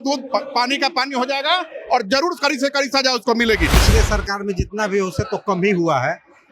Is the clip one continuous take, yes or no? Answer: no